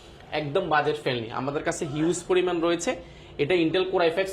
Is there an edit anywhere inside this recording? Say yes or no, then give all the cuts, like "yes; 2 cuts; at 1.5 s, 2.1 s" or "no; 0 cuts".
no; 0 cuts